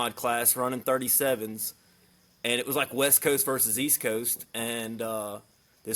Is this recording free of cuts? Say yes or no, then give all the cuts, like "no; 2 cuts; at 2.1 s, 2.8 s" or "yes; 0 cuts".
yes; 0 cuts